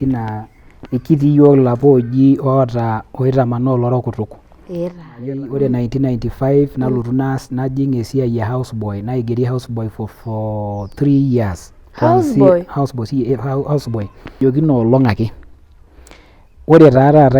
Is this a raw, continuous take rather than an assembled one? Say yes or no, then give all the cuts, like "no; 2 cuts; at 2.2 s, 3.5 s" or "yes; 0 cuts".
no; 2 cuts; at 5.2 s, 14.4 s